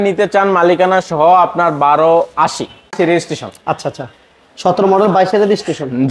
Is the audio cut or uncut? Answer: cut